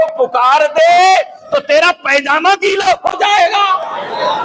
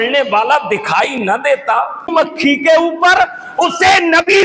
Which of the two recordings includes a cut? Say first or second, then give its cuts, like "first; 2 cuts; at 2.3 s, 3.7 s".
second; 1 cut; at 2.1 s